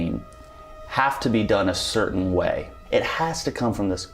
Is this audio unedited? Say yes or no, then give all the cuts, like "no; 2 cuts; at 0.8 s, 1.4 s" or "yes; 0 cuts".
no; 1 cut; at 2.8 s